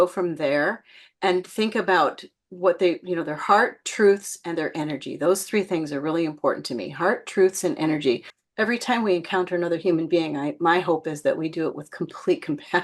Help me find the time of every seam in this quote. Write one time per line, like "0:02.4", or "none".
0:08.3

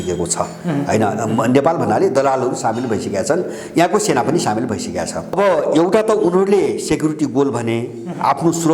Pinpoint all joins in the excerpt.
0:05.4

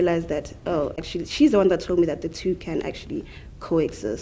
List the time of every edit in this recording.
none

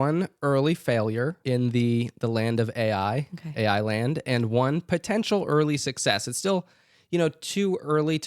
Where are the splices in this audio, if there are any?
0:01.4

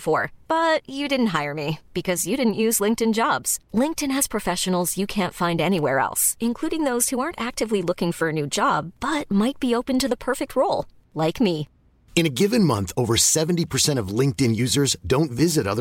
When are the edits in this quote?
none

